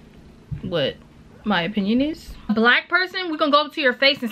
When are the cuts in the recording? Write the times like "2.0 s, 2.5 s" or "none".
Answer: 2.5 s